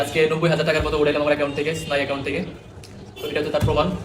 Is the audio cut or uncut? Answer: uncut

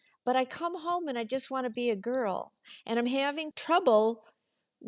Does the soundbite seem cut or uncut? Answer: cut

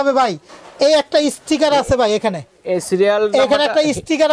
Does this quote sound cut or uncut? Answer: uncut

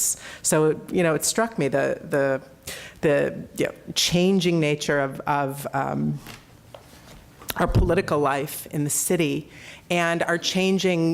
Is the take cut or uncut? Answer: cut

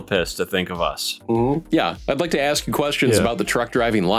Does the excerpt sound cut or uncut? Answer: uncut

